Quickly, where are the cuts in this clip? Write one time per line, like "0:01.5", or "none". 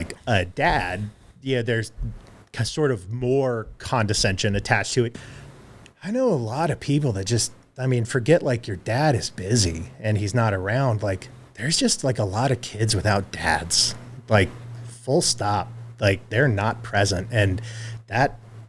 0:05.1